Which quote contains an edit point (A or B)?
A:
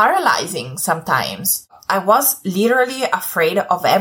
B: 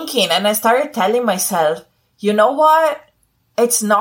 A